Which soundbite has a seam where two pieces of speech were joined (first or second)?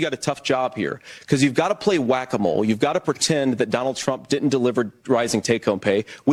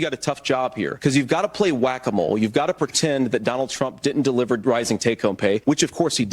second